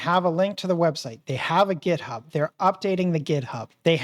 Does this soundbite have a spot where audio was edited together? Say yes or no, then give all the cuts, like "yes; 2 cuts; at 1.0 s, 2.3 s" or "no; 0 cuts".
no; 0 cuts